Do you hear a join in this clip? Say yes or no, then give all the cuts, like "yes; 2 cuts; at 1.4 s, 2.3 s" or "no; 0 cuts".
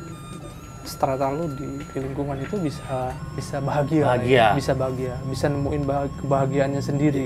yes; 1 cut; at 3.4 s